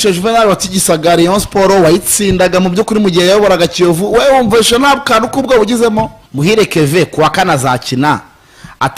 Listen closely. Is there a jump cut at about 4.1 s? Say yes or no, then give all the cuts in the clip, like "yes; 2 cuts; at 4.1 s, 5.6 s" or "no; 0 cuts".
no; 1 cut; at 6.2 s